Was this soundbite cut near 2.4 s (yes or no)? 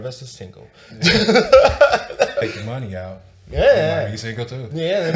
yes